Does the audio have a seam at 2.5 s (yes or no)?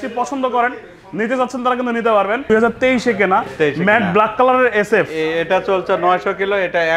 yes